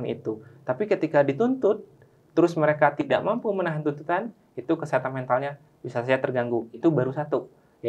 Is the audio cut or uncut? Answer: uncut